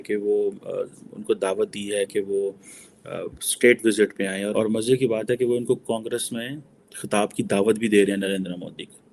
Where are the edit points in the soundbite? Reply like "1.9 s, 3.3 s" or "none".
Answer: 4.5 s